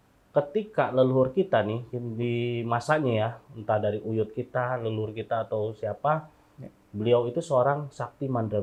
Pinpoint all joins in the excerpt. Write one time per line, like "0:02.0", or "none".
none